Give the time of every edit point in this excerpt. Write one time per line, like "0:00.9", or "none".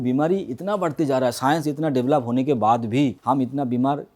0:03.2